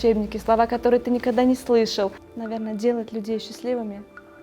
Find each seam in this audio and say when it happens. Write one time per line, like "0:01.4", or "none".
0:02.2